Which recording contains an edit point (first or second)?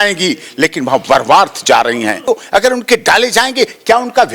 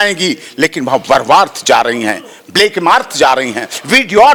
first